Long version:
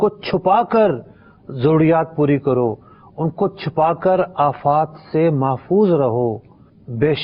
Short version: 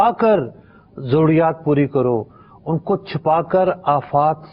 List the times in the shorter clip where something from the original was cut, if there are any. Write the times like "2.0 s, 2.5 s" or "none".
none